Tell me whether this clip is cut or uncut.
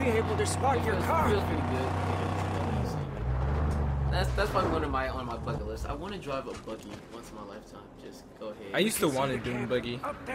cut